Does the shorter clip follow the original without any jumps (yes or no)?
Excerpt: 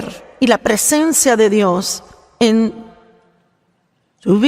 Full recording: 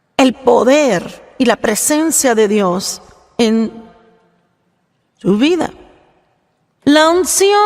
yes